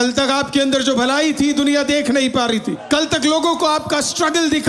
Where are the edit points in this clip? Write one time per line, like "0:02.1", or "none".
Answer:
0:02.8